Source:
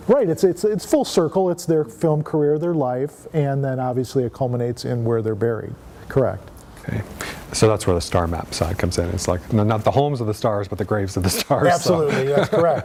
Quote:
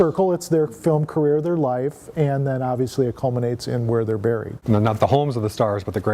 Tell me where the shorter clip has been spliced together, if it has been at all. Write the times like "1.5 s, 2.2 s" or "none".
4.6 s